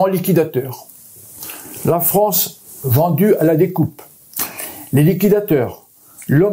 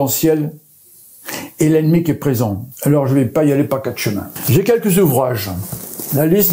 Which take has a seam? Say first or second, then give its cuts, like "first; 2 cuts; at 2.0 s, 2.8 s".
second; 2 cuts; at 2.7 s, 4.3 s